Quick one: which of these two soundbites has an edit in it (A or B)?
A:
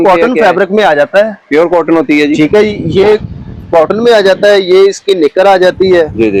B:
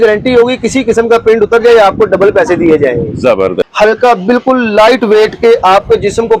B